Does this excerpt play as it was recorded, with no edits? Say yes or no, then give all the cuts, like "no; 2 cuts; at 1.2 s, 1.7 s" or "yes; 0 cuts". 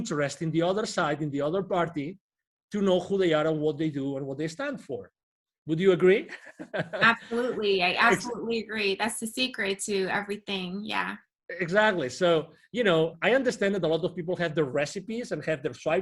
yes; 0 cuts